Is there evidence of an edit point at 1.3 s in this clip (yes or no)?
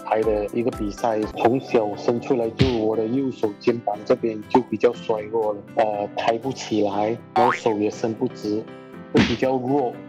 yes